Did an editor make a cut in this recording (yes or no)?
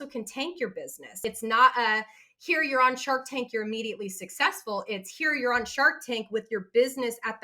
yes